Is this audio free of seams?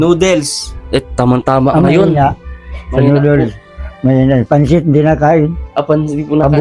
yes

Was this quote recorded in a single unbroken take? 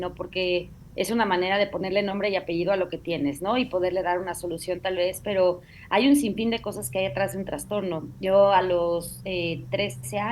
yes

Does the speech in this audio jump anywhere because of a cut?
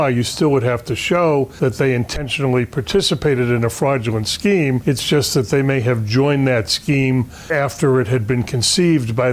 yes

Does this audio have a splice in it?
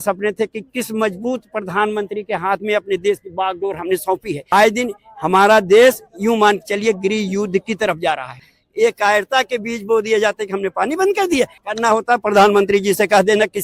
yes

